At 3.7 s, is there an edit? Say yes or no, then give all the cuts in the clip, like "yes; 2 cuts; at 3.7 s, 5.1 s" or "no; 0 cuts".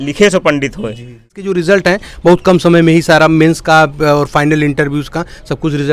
no; 1 cut; at 1.4 s